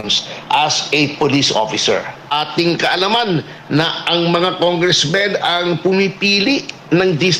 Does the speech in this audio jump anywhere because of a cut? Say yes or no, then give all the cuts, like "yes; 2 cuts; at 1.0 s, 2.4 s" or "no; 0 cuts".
yes; 1 cut; at 2.3 s